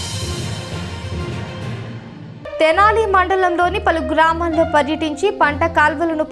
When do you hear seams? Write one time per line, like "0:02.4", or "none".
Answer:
0:02.0